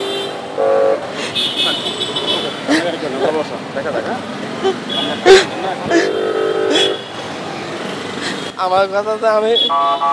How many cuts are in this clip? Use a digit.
1